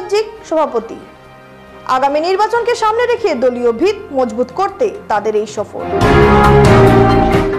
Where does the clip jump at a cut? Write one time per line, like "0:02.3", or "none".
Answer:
none